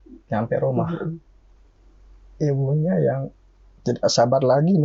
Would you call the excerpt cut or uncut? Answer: uncut